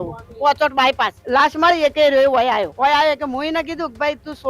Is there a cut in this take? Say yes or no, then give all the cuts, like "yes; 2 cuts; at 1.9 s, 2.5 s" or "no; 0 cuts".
yes; 2 cuts; at 1.2 s, 2.7 s